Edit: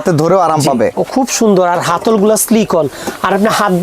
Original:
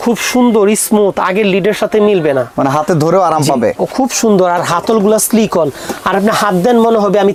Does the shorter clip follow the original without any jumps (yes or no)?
yes